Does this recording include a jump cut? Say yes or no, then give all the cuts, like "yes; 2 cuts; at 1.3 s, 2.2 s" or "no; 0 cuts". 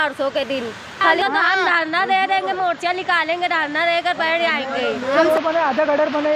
yes; 2 cuts; at 1.2 s, 5.2 s